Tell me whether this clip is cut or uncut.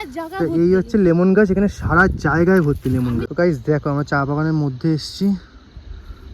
cut